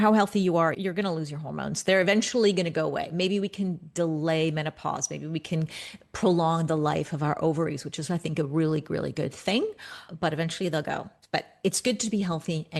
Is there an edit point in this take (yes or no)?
no